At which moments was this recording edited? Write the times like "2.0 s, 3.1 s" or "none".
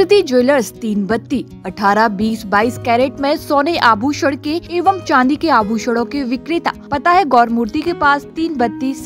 4.6 s, 6.8 s